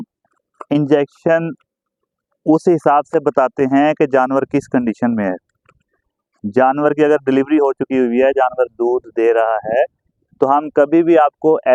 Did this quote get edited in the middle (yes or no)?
no